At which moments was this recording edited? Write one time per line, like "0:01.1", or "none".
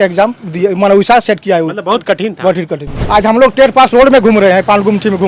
0:02.9

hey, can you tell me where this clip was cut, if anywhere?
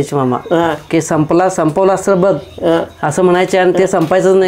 none

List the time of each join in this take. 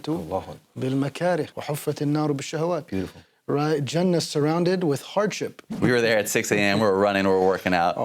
0:01.6
0:05.6

